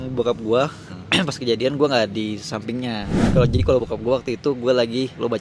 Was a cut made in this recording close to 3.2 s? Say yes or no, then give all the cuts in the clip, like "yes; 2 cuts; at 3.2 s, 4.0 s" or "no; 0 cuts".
yes; 1 cut; at 3.2 s